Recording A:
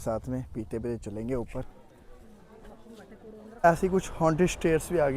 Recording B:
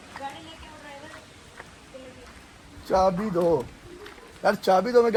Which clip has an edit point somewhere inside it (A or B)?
A